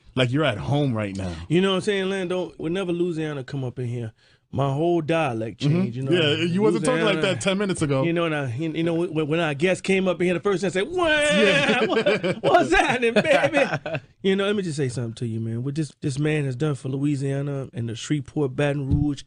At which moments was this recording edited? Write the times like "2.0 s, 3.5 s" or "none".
15.0 s